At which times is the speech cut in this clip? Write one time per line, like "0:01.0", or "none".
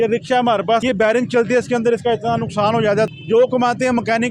0:00.8
0:03.1